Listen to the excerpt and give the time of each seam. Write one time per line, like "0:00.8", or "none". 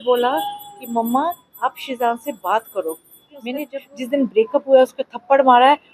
0:03.7